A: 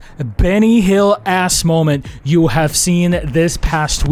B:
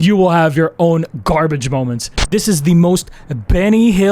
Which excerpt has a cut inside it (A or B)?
B